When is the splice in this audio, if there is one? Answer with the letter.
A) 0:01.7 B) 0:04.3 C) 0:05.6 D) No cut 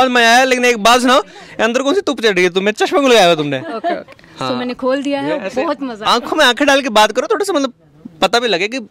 D